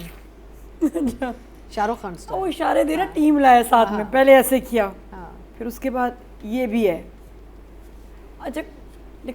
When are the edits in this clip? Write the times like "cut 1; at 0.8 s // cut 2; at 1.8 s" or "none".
none

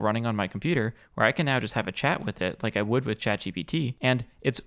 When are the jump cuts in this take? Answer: none

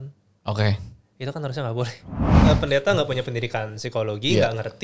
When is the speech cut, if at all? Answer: cut 1; at 2.3 s

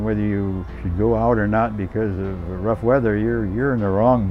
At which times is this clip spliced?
none

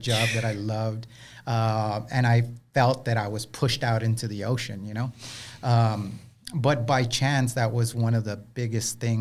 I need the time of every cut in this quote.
none

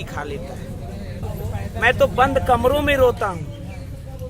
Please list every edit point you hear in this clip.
cut 1; at 1.2 s

